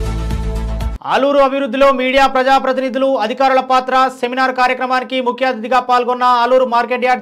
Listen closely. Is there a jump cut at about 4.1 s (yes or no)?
no